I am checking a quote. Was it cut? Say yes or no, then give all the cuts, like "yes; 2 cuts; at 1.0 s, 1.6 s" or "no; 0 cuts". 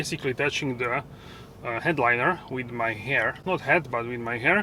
no; 0 cuts